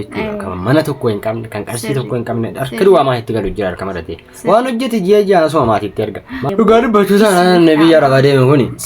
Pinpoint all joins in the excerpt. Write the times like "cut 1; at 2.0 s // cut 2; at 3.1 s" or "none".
cut 1; at 6.3 s